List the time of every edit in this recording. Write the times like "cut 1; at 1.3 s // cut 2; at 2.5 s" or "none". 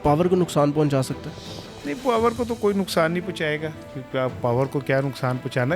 none